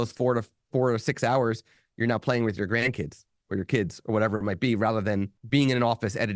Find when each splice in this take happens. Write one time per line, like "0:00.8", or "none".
0:05.4